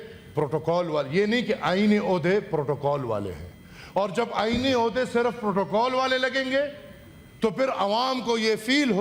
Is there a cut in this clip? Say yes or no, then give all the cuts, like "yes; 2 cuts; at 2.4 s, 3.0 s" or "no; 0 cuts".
no; 0 cuts